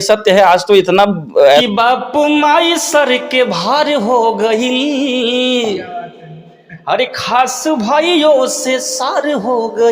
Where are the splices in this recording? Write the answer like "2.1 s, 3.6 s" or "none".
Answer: 1.6 s